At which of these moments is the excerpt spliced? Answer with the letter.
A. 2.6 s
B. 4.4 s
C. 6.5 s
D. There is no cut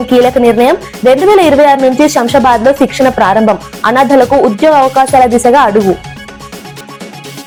D